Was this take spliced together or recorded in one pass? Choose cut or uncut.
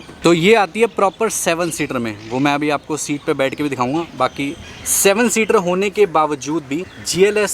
uncut